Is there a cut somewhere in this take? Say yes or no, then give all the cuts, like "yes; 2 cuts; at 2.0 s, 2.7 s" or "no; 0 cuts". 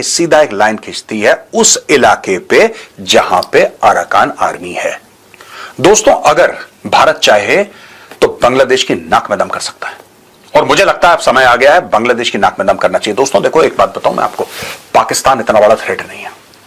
no; 0 cuts